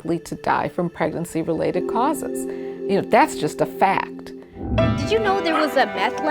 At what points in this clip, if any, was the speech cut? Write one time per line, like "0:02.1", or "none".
0:04.9